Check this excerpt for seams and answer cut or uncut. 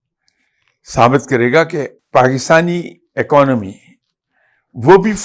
cut